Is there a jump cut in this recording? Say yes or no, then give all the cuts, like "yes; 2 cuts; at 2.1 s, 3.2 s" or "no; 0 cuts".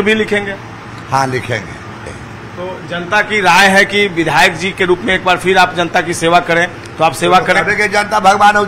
yes; 1 cut; at 2.1 s